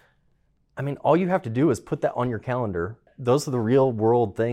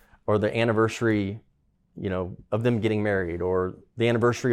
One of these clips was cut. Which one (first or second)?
first